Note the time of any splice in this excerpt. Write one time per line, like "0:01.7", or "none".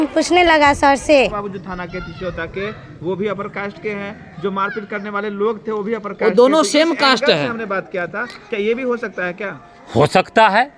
0:01.3